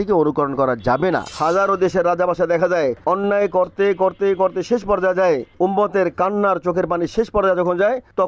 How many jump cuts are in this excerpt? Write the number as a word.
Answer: one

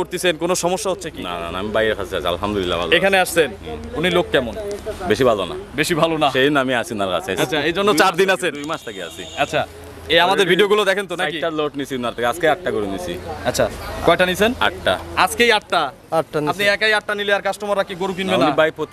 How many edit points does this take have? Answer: zero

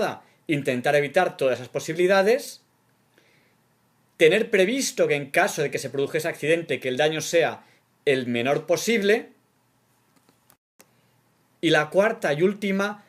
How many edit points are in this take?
one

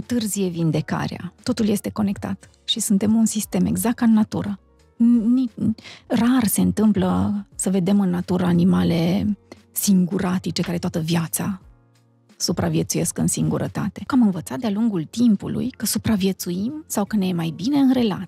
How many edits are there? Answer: two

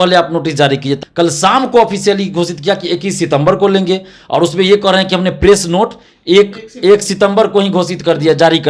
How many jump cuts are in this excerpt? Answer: one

